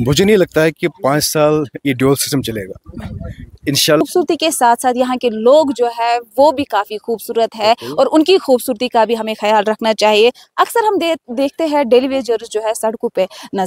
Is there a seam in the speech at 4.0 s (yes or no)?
yes